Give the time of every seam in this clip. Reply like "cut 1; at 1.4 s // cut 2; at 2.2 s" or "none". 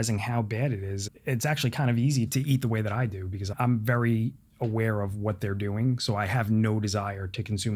cut 1; at 1.0 s // cut 2; at 2.3 s // cut 3; at 3.5 s